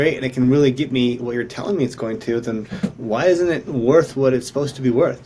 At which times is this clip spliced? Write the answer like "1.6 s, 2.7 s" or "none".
none